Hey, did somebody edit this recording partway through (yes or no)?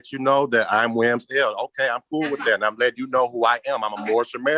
no